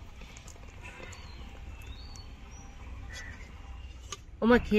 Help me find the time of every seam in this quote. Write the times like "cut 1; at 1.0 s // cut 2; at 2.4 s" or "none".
none